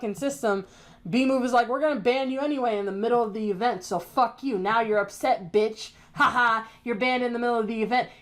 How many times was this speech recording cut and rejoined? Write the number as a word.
zero